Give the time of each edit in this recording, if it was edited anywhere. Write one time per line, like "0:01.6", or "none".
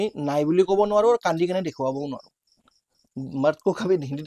none